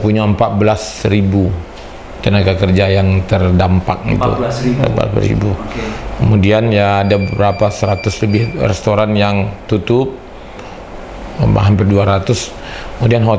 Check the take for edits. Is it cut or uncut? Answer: uncut